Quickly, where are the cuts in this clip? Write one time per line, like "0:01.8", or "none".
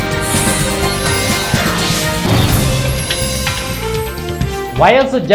0:02.9
0:04.4